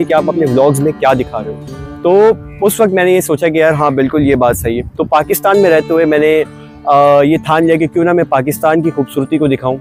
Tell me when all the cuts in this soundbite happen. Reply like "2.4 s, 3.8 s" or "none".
none